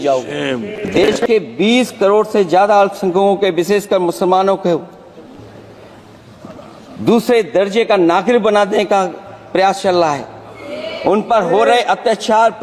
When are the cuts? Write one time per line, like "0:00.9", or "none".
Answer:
0:01.1